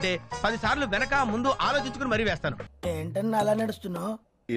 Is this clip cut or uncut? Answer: cut